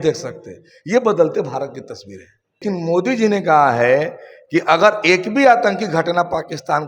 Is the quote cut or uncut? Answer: cut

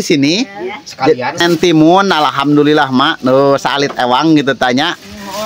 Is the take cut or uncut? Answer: cut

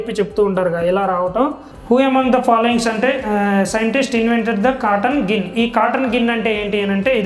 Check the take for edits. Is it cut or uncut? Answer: cut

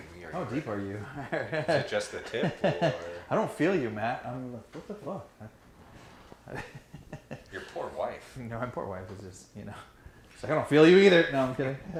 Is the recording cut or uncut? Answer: uncut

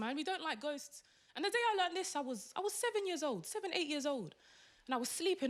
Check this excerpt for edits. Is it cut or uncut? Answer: uncut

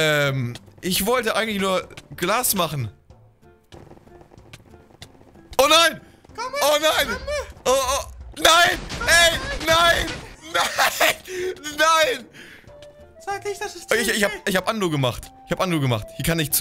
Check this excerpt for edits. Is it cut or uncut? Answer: uncut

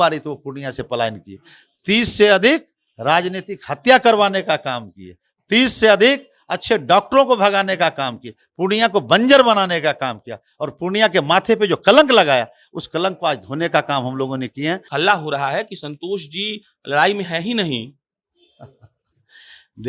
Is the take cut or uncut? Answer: cut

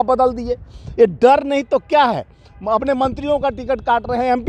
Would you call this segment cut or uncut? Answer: uncut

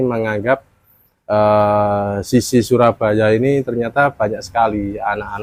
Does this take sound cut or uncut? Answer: uncut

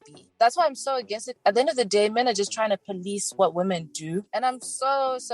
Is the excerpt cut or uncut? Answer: cut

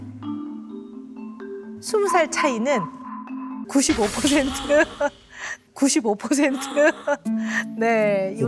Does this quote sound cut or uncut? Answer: cut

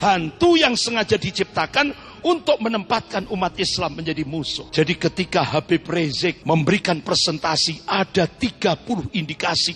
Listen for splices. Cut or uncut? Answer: cut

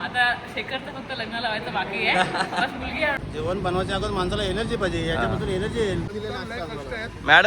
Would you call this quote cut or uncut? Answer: cut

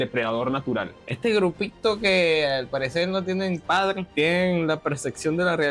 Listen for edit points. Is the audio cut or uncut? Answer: cut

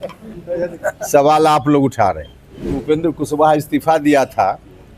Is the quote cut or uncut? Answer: cut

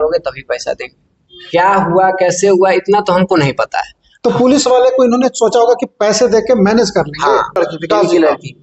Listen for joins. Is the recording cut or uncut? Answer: cut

